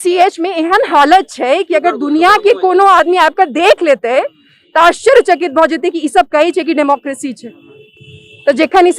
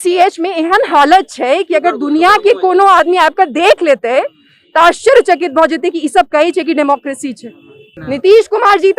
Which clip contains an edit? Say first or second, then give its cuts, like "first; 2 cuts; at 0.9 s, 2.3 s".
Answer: second; 1 cut; at 7.9 s